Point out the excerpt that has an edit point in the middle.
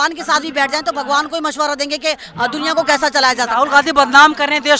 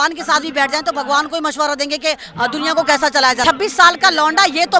second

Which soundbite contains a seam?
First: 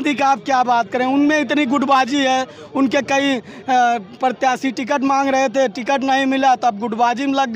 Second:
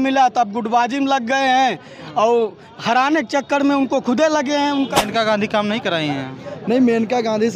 second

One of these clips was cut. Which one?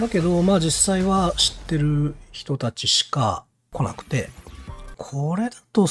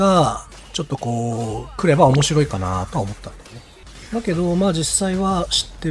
first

